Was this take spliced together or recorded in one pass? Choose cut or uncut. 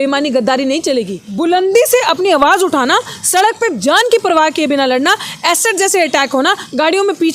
cut